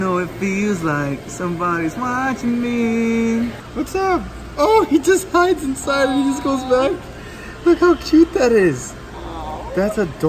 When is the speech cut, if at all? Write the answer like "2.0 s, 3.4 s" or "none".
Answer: 3.6 s